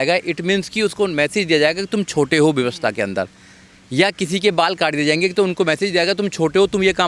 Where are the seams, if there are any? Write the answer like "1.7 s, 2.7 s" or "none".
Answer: none

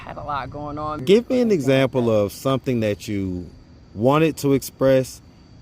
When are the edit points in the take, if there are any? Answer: 1.0 s

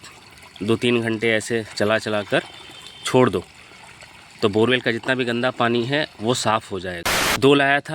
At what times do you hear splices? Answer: 7.1 s

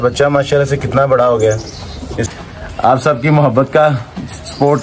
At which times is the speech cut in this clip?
2.3 s

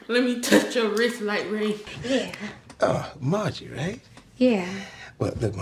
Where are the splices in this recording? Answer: none

